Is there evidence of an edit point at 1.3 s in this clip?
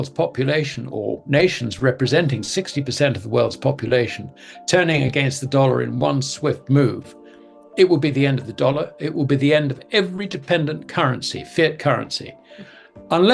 no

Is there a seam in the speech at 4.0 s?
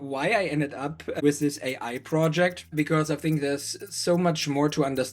no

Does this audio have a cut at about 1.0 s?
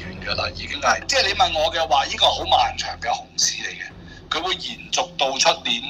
yes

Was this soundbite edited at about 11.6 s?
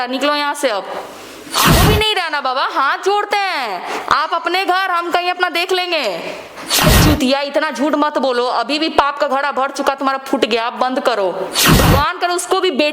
yes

